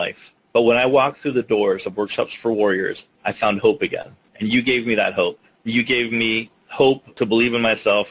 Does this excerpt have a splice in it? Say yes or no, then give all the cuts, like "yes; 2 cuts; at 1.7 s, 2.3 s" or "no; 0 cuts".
yes; 2 cuts; at 5.5 s, 6.9 s